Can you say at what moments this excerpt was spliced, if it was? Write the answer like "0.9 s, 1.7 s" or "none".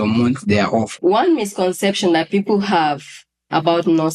0.9 s